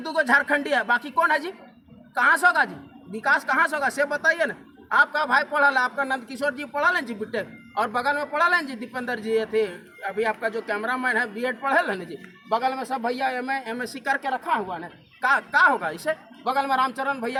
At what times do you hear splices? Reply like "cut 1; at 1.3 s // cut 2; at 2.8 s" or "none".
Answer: none

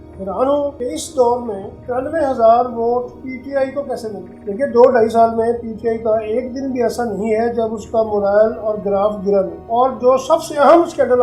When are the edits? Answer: cut 1; at 0.8 s // cut 2; at 1.7 s // cut 3; at 3.2 s // cut 4; at 4.3 s // cut 5; at 9.6 s

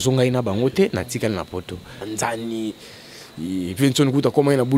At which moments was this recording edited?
cut 1; at 2.1 s

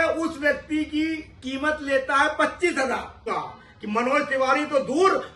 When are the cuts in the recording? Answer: cut 1; at 3.3 s

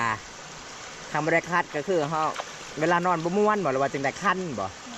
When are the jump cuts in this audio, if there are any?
none

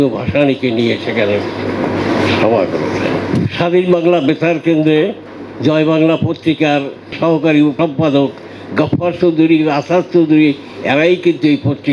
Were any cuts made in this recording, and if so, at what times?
cut 1; at 3.2 s // cut 2; at 7.1 s // cut 3; at 7.7 s

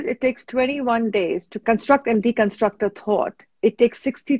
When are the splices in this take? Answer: cut 1; at 1.5 s

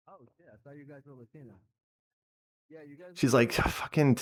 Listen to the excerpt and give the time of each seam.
none

